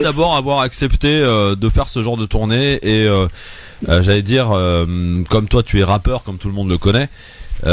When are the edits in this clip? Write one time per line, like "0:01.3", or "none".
none